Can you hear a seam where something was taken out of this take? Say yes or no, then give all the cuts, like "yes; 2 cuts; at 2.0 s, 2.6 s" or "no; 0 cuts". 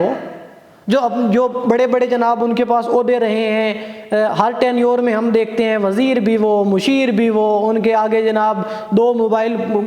no; 0 cuts